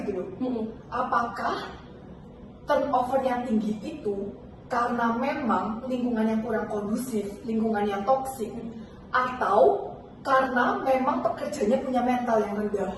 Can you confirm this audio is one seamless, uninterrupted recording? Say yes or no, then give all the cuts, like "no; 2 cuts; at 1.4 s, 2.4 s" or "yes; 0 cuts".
yes; 0 cuts